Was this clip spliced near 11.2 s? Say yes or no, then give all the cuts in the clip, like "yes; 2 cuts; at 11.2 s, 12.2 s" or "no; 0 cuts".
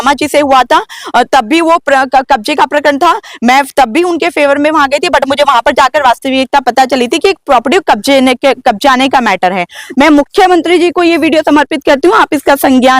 no; 1 cut; at 9.8 s